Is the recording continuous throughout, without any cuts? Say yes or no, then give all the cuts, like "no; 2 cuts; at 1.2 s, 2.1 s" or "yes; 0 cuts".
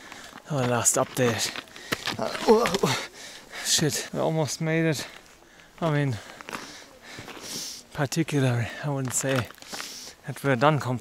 no; 1 cut; at 4.0 s